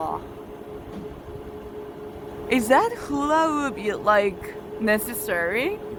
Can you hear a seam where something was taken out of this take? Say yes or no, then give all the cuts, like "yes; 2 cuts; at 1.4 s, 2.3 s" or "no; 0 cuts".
no; 0 cuts